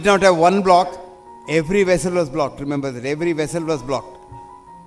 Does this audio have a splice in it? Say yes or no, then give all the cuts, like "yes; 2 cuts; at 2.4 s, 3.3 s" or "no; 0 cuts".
no; 0 cuts